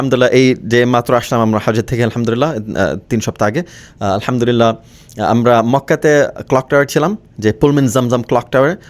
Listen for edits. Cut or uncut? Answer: uncut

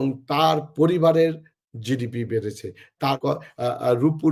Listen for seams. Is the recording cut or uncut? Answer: cut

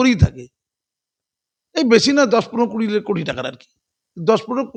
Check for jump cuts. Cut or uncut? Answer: uncut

